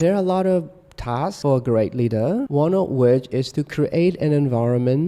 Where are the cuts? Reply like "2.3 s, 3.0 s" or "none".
1.4 s, 2.5 s